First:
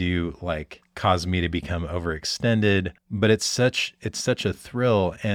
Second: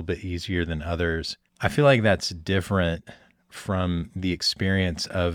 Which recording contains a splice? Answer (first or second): first